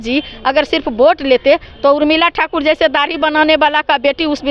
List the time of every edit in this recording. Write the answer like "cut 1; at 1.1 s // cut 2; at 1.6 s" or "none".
none